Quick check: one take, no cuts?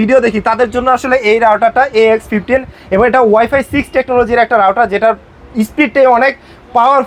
yes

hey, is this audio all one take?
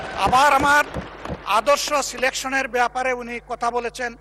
yes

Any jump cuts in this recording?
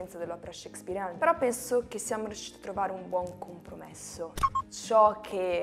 yes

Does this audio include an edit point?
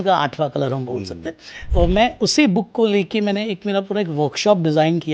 yes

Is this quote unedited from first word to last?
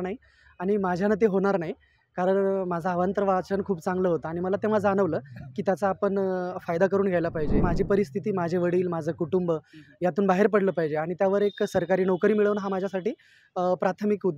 no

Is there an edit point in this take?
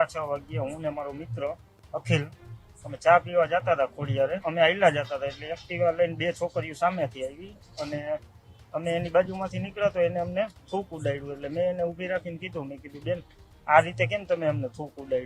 yes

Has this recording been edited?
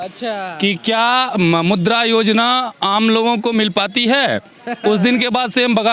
no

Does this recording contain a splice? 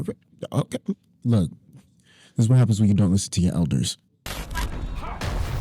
yes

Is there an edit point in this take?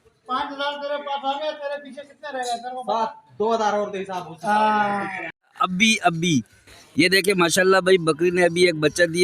yes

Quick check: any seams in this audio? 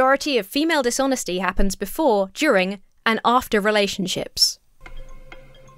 no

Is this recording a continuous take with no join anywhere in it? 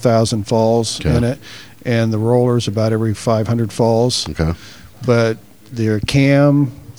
yes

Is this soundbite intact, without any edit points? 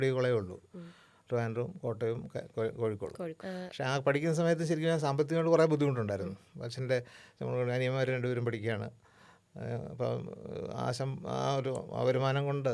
no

